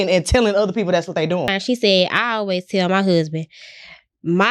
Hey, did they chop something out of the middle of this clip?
yes; 1 cut; at 1.5 s

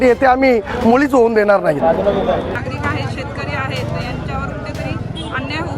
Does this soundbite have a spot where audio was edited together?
yes; 1 cut; at 2.6 s

